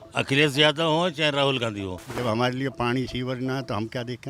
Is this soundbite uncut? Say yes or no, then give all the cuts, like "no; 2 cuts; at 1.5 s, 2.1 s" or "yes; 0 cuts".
no; 1 cut; at 2.0 s